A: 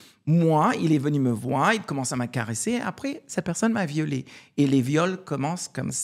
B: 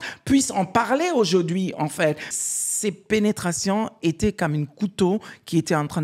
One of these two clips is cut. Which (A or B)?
B